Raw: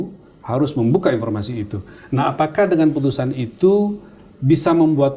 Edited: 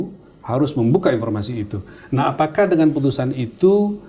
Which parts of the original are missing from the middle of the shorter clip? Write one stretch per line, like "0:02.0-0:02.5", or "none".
none